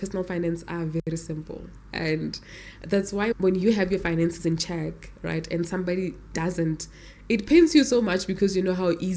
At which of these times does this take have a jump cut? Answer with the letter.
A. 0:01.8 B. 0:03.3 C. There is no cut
B